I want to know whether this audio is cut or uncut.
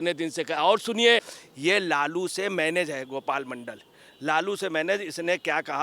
cut